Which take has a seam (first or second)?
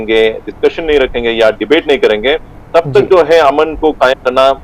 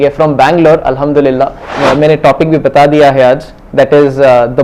second